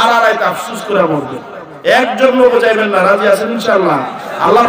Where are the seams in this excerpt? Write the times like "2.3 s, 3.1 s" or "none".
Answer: none